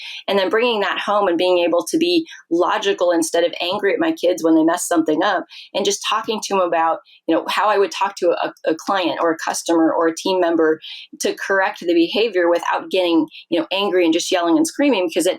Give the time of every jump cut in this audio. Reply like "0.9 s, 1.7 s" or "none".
none